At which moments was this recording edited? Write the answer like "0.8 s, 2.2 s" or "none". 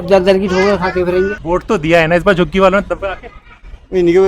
1.4 s